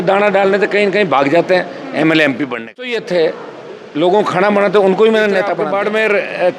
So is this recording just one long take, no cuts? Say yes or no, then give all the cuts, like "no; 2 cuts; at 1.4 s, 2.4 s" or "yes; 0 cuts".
no; 2 cuts; at 3.0 s, 5.5 s